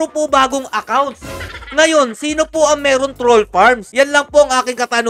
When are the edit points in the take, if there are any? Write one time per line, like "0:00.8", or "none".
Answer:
none